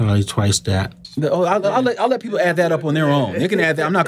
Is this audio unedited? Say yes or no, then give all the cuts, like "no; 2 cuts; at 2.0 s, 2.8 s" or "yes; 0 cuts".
no; 1 cut; at 1.1 s